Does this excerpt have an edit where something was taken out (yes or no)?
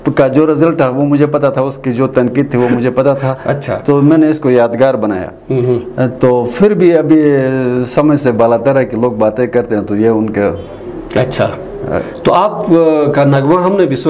no